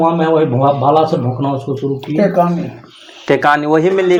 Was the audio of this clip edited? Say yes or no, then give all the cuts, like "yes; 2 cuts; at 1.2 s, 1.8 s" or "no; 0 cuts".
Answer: no; 0 cuts